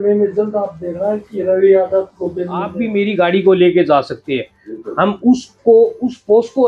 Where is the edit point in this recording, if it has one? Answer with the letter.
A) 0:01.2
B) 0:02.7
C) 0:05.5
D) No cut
B